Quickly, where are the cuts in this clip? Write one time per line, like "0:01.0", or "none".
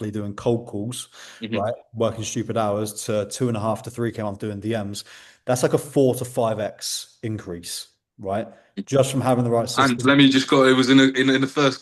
none